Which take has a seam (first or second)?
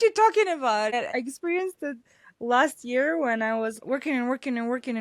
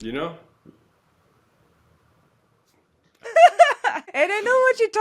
second